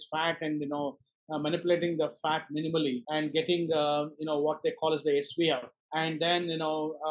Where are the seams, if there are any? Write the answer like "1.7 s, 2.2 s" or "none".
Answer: 3.0 s, 5.8 s